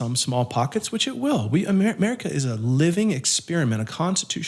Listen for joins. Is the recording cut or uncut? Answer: uncut